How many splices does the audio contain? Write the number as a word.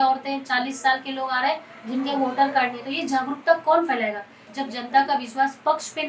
one